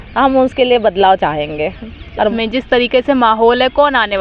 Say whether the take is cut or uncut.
uncut